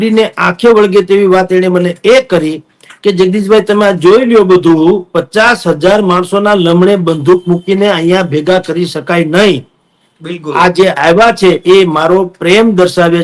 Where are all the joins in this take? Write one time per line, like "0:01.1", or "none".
none